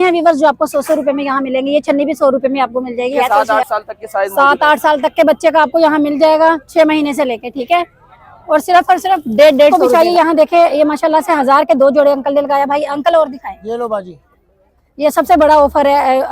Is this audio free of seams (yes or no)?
no